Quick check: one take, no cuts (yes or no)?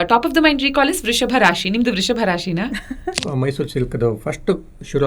no